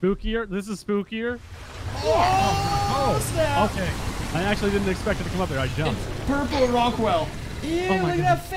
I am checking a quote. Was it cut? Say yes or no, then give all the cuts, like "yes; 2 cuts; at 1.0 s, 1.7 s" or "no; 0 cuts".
no; 0 cuts